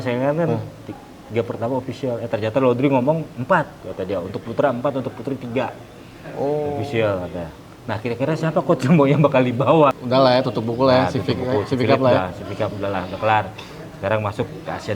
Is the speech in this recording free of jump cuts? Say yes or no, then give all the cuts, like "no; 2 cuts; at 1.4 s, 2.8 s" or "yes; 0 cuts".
no; 1 cut; at 10.0 s